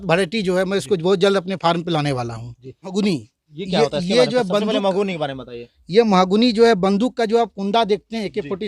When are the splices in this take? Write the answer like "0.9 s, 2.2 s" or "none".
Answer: 2.9 s